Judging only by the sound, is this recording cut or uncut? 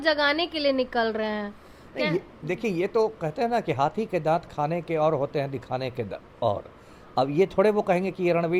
uncut